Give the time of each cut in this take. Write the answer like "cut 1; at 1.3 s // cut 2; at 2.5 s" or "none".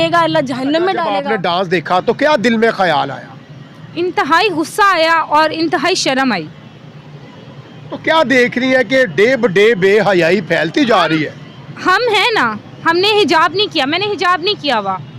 cut 1; at 1.2 s